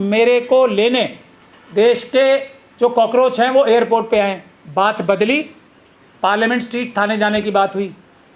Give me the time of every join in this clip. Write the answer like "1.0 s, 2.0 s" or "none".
4.5 s